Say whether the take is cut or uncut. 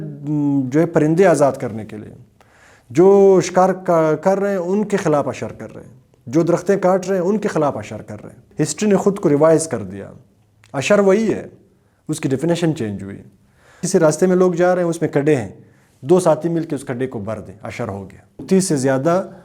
cut